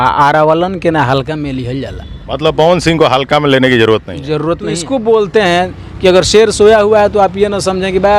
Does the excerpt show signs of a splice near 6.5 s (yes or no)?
no